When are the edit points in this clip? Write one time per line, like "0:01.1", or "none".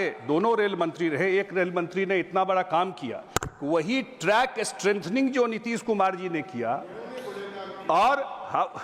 none

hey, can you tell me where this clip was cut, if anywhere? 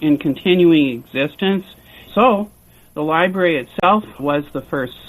0:02.0

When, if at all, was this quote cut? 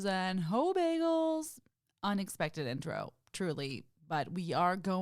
none

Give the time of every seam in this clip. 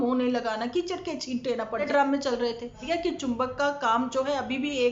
0:01.9
0:02.8

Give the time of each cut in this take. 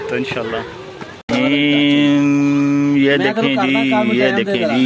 0:01.3

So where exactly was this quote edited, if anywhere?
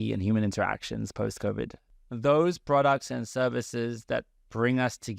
0:01.9

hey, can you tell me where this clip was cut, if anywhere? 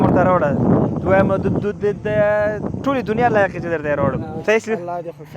0:04.3

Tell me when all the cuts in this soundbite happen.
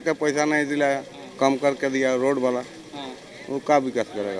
none

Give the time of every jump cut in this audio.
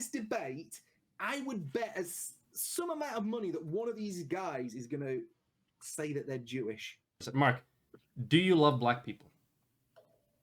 0:07.3

